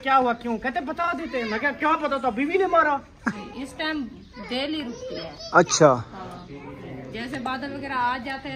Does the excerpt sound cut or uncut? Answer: cut